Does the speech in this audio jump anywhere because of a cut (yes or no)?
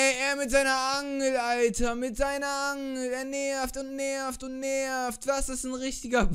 no